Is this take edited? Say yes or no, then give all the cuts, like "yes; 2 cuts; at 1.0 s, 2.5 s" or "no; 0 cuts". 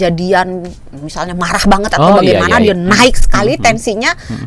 no; 0 cuts